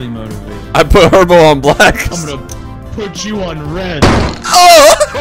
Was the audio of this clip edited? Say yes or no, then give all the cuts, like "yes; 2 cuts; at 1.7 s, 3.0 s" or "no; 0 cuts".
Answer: yes; 1 cut; at 2.1 s